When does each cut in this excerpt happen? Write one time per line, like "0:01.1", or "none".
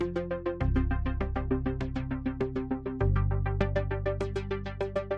none